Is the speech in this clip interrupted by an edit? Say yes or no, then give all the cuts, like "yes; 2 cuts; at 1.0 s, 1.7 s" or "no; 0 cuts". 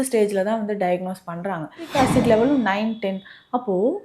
yes; 1 cut; at 1.9 s